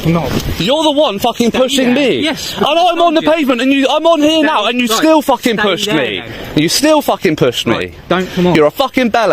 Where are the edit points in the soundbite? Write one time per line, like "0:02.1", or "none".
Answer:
none